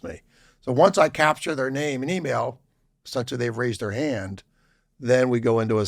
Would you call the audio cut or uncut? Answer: uncut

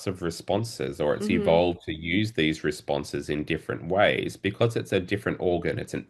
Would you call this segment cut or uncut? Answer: uncut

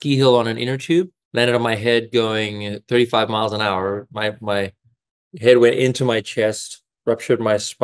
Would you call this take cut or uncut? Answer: cut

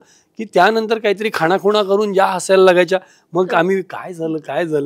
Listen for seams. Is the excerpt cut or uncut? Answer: uncut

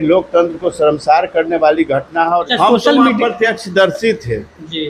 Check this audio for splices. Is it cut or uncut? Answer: cut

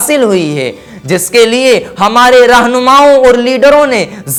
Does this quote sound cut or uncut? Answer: uncut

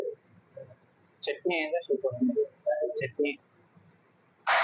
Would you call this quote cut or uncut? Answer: uncut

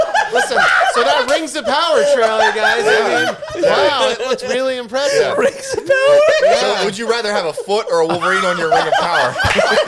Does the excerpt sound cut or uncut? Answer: uncut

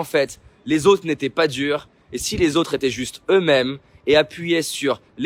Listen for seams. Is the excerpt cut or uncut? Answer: uncut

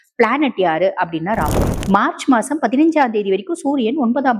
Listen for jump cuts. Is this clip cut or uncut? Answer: cut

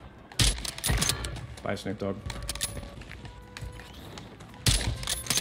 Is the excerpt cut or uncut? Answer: cut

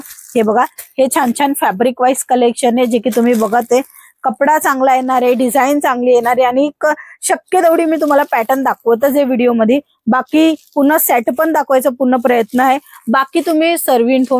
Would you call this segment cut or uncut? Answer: uncut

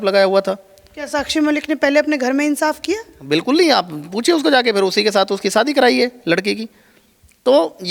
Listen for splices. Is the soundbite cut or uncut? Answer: uncut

